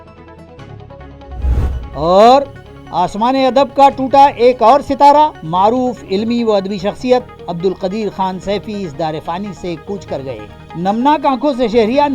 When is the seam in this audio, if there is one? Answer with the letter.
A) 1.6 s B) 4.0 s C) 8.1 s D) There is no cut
A